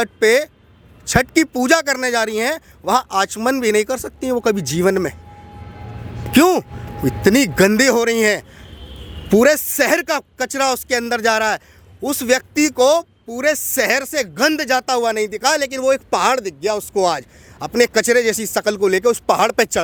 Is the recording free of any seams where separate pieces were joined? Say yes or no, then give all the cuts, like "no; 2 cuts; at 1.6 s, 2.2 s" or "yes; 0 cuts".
yes; 0 cuts